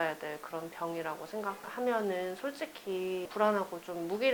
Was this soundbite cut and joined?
no; 0 cuts

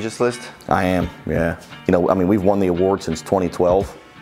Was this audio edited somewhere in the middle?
no; 0 cuts

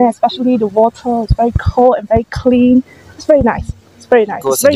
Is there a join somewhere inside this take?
no; 0 cuts

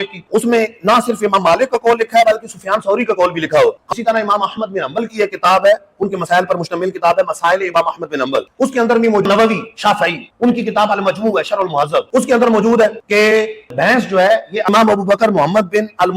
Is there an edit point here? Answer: yes; 3 cuts; at 3.8 s, 9.2 s, 14.7 s

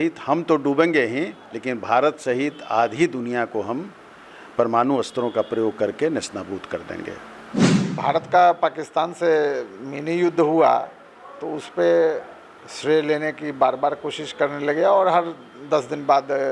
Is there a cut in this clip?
yes; 1 cut; at 7.8 s

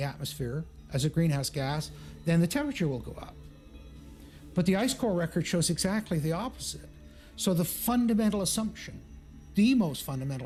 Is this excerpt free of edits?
yes; 0 cuts

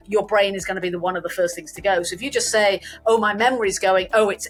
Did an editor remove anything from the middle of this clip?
no; 0 cuts

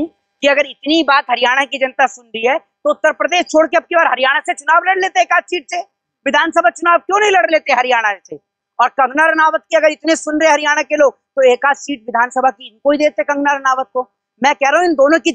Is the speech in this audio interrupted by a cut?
no; 0 cuts

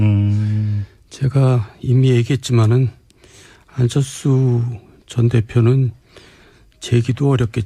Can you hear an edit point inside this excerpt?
yes; 1 cut; at 1.7 s

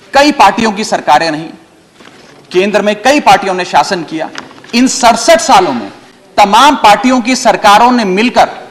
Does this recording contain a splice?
no; 0 cuts

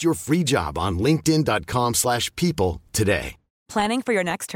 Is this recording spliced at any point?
no; 0 cuts

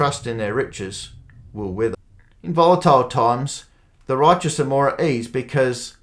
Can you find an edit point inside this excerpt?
yes; 1 cut; at 1.9 s

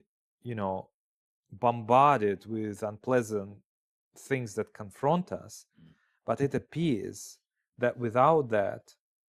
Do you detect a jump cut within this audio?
no; 0 cuts

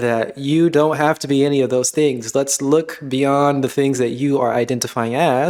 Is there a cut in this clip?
no; 0 cuts

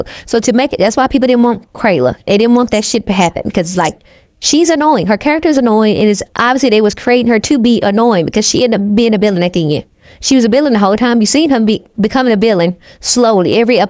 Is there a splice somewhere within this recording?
no; 0 cuts

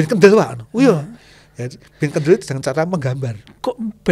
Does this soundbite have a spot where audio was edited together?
no; 0 cuts

